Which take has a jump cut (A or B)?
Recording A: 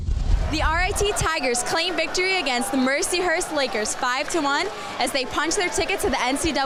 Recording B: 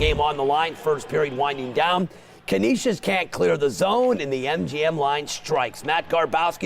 B